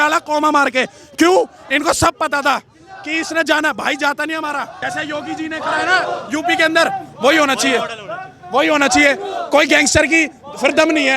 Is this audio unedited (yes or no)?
no